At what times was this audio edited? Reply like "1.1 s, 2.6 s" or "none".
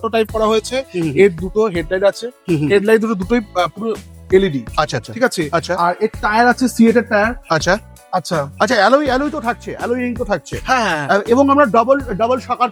none